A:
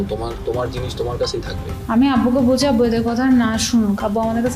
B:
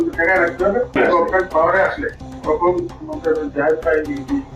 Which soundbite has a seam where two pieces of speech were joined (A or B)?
A